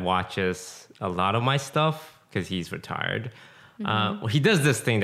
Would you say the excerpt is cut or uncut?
uncut